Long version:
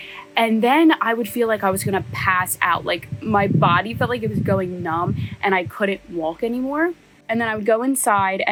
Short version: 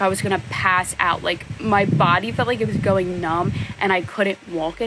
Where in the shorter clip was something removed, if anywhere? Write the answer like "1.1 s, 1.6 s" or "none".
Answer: none